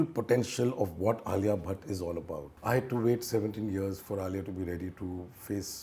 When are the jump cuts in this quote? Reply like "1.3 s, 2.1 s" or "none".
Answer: 2.5 s